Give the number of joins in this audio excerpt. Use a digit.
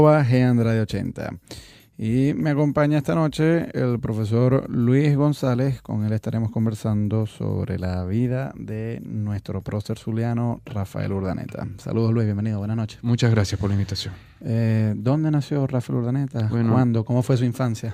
1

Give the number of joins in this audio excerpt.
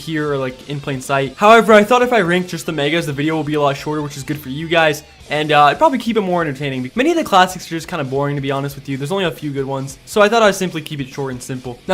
1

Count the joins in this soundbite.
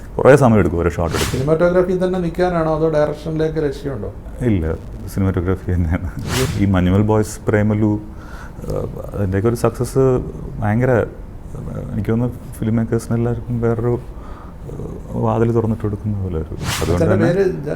3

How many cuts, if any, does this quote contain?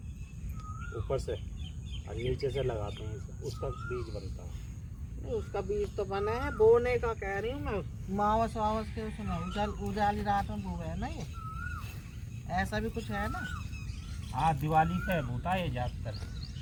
0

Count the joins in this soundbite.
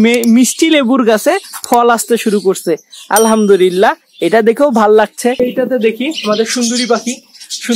1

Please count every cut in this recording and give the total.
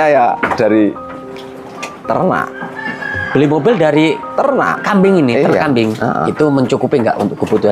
1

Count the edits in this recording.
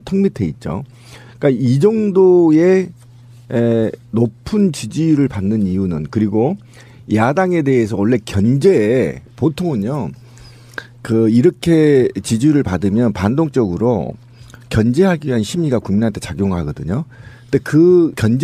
1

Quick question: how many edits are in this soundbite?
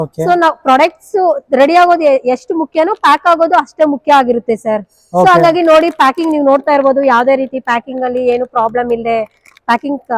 0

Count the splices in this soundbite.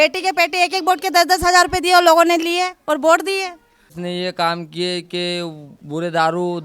1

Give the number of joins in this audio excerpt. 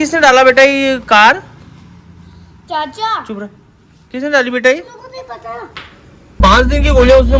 1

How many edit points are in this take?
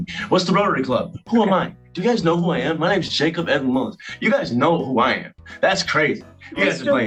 0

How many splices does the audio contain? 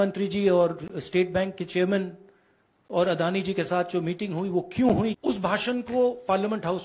1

